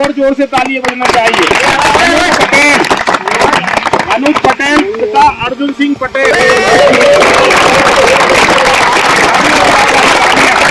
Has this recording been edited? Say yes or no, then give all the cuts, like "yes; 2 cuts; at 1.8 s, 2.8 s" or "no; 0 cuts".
no; 0 cuts